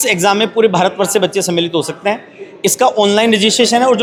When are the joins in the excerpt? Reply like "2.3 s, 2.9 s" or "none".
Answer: none

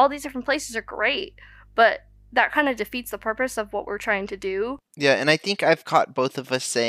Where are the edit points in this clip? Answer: 4.9 s

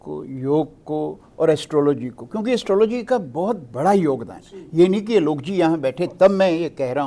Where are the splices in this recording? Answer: none

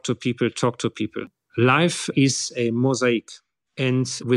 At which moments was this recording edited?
1.3 s

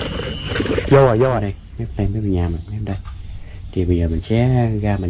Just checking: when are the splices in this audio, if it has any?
1.6 s

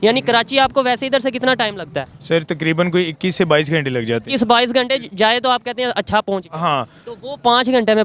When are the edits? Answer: none

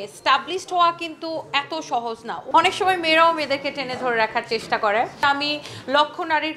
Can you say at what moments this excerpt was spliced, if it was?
2.4 s, 5.2 s

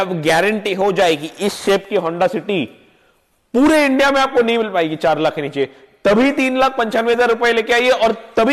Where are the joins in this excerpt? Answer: none

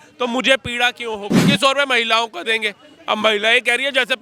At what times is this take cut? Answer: 1.4 s

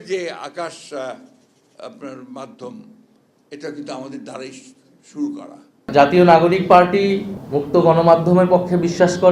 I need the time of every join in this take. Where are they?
5.9 s

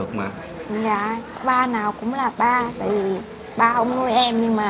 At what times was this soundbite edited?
none

